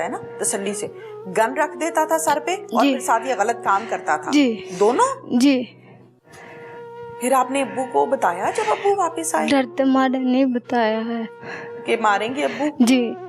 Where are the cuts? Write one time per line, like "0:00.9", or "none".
none